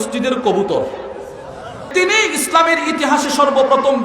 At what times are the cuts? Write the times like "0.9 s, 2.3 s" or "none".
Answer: 1.9 s